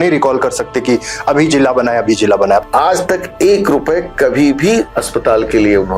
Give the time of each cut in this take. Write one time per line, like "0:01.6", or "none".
0:02.6
0:05.0